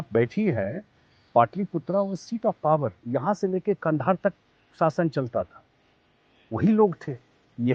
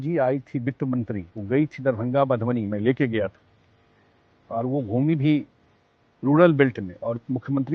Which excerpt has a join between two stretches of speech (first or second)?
second